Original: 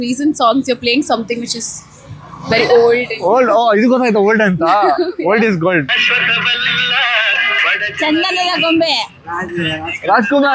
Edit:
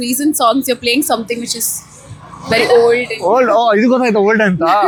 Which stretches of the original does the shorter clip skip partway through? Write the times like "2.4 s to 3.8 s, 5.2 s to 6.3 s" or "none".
none